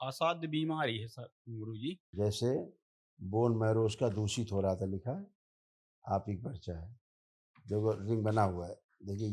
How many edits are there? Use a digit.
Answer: 1